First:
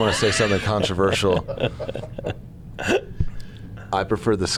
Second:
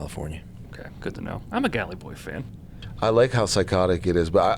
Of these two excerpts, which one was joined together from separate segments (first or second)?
second